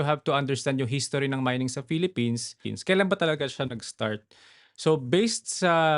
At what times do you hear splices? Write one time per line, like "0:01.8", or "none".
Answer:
0:02.6